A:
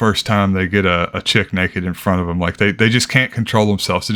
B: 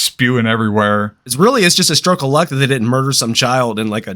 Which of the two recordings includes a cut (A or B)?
B